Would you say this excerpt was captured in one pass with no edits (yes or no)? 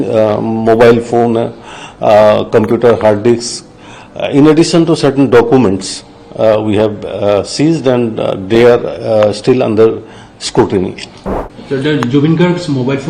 no